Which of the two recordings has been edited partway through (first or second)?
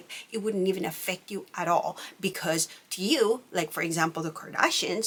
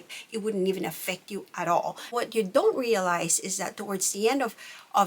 second